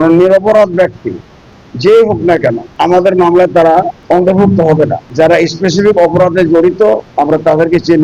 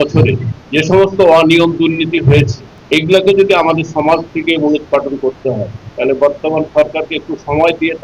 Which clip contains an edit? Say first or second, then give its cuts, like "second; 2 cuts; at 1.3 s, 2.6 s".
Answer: first; 4 cuts; at 2.7 s, 4.0 s, 5.0 s, 7.1 s